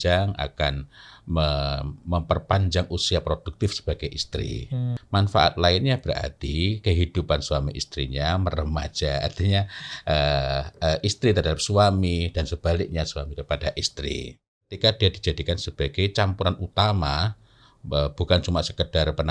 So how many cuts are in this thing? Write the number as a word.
two